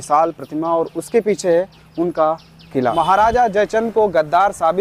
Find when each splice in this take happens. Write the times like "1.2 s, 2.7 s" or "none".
2.9 s